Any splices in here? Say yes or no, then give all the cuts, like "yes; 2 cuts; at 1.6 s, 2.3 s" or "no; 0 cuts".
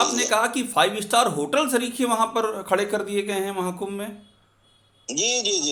no; 0 cuts